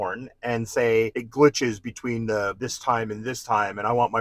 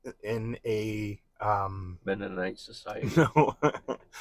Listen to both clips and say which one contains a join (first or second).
first